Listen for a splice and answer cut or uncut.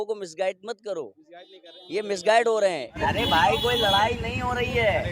cut